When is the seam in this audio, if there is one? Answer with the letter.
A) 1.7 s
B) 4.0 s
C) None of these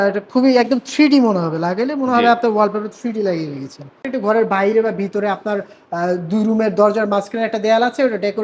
B